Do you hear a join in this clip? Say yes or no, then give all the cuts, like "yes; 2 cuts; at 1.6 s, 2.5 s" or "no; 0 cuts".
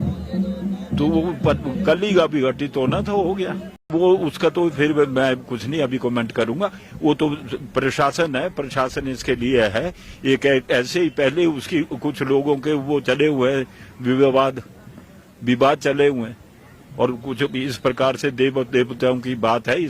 yes; 1 cut; at 3.9 s